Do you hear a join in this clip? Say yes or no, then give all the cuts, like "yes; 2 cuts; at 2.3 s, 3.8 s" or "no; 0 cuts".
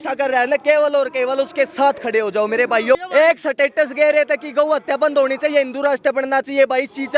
yes; 1 cut; at 2.9 s